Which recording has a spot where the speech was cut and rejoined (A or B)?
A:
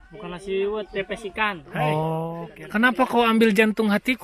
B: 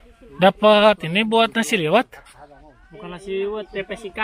A